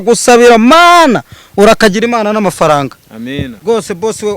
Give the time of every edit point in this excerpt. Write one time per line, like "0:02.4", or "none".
none